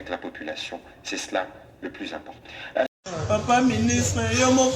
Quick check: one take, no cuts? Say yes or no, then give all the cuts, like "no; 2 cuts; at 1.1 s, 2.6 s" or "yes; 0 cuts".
no; 1 cut; at 2.9 s